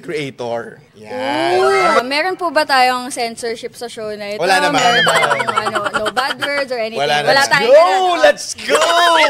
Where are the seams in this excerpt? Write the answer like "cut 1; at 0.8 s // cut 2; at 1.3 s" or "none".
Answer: cut 1; at 2.0 s